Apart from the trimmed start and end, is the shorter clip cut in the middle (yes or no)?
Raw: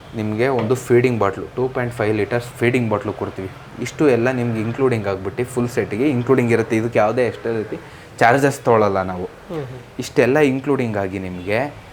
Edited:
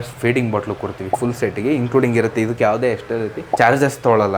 yes